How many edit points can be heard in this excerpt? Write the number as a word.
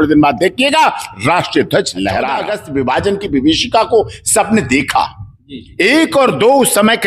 one